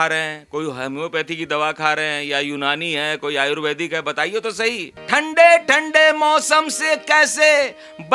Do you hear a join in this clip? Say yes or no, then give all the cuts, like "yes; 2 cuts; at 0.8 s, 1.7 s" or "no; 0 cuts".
yes; 1 cut; at 4.9 s